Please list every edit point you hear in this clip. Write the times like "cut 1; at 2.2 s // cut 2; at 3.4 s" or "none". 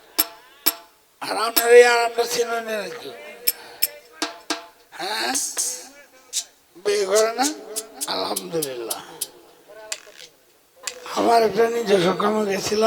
cut 1; at 10.9 s